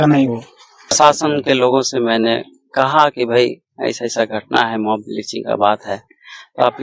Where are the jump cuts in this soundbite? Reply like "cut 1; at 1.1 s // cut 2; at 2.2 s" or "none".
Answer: cut 1; at 0.9 s